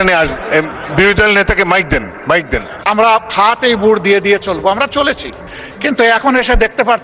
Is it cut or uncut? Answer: cut